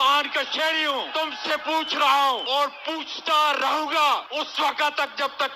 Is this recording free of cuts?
no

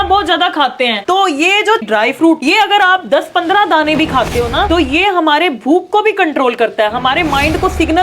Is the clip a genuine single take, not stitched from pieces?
no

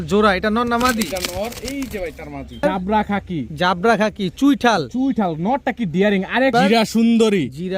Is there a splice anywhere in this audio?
yes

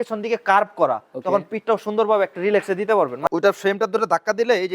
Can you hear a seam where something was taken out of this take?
yes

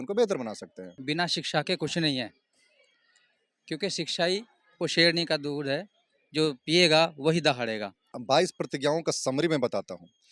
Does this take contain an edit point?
yes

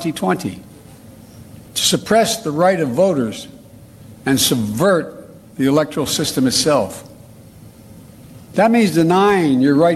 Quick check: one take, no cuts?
yes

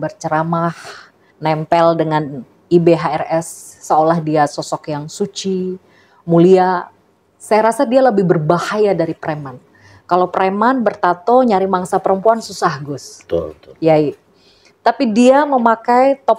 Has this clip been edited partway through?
no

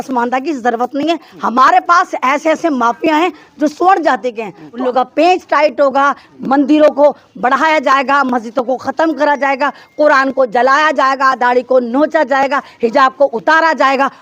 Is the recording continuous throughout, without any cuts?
no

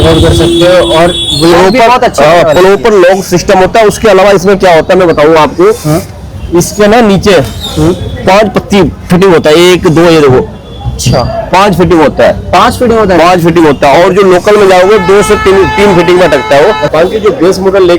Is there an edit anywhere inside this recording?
yes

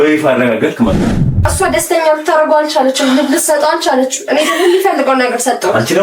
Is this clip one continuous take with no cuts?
no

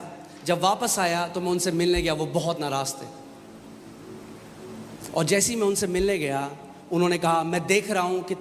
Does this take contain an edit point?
no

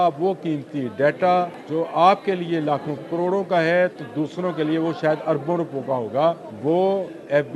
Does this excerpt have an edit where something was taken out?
yes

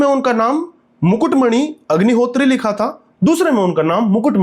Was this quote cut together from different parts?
no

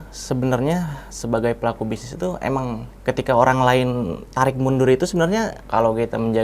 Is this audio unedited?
no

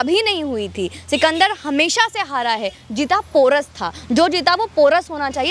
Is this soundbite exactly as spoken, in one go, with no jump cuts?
yes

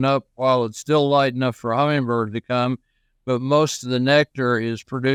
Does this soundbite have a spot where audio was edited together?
no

